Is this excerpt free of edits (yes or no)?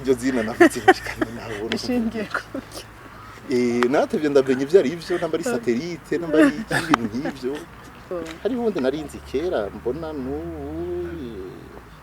no